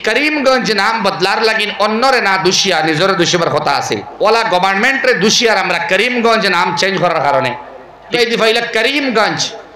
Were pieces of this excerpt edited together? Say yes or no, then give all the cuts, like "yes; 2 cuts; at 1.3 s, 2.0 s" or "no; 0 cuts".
yes; 2 cuts; at 4.1 s, 8.1 s